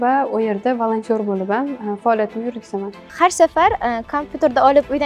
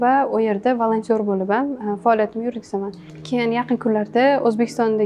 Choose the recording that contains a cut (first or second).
first